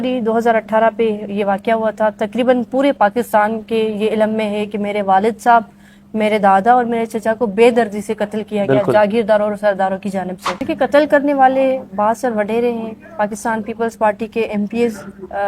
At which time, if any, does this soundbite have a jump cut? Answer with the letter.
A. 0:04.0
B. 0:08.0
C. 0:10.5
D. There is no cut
C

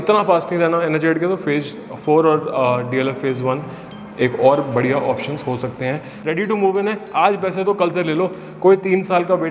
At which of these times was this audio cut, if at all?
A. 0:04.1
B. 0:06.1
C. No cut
B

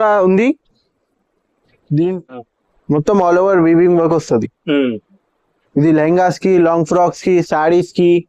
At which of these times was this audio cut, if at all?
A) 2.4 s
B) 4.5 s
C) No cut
A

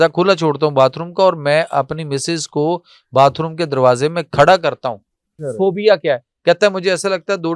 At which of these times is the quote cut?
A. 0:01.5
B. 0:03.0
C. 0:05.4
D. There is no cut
C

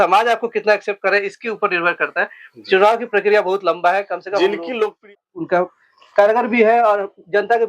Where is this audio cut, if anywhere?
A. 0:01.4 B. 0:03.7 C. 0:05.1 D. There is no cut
C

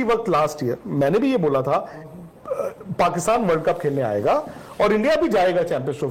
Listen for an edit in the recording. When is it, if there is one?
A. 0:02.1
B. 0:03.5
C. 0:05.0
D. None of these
A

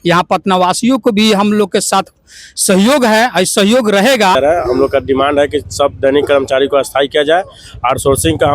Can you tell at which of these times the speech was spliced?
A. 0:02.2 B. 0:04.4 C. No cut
B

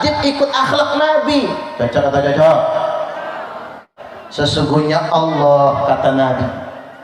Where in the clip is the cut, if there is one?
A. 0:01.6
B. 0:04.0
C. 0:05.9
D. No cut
B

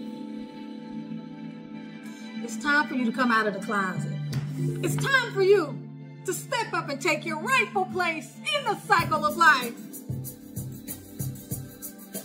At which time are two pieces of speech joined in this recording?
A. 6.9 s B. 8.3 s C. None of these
C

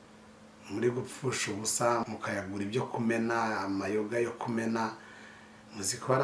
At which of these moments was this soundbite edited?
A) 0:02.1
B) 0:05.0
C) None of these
A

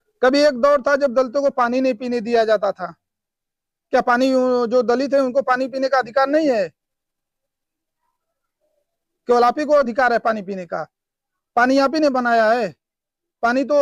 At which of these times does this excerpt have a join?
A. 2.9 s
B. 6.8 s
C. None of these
C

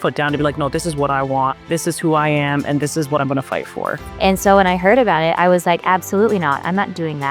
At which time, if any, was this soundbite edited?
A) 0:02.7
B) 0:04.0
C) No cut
B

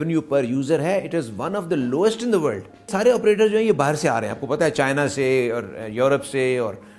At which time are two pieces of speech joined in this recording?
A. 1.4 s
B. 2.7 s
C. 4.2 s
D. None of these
B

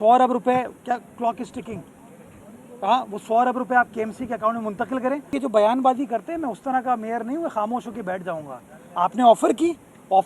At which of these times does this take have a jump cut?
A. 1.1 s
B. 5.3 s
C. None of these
B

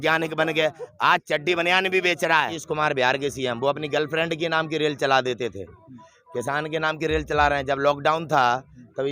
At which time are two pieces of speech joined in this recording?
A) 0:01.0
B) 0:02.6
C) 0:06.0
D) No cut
B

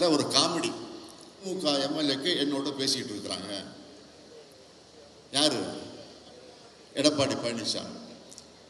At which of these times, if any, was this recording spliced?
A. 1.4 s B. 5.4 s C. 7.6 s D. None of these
A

